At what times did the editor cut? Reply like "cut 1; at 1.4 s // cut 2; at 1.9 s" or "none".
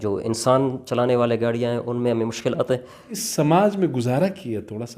cut 1; at 3.2 s